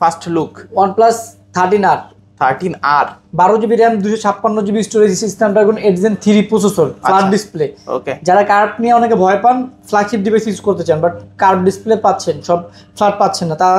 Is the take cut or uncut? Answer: uncut